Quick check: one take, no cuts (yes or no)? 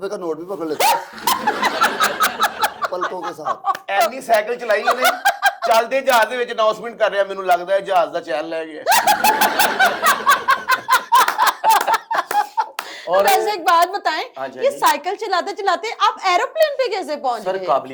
yes